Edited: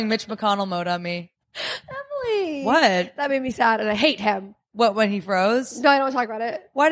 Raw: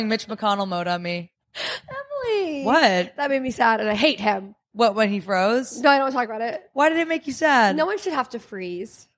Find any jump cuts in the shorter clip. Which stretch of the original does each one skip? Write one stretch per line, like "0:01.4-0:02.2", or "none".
none